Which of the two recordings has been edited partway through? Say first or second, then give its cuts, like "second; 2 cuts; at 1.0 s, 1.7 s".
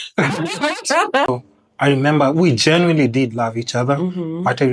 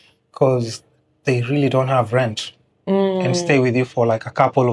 first; 1 cut; at 1.3 s